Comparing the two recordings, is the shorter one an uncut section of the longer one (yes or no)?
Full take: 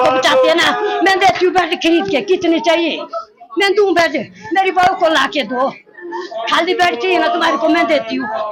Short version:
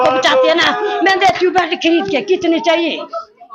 yes